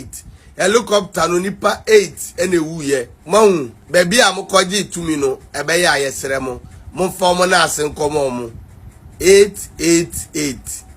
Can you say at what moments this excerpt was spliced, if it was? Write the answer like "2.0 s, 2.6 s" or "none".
3.1 s, 3.8 s